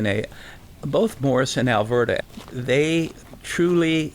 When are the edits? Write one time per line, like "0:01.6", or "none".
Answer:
0:02.2
0:03.2